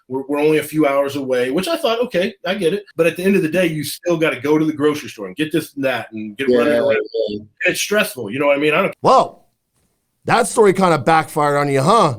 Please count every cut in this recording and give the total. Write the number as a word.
one